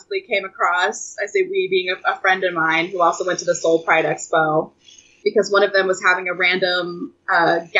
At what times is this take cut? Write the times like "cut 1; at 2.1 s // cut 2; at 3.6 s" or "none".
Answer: none